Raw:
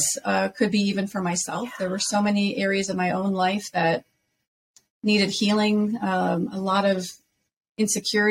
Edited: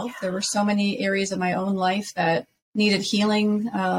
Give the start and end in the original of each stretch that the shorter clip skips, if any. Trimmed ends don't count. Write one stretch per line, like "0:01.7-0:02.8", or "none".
0:04.1-0:04.9